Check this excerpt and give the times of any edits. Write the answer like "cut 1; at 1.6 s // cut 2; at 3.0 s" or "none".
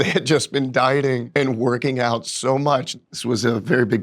cut 1; at 1.2 s // cut 2; at 2.9 s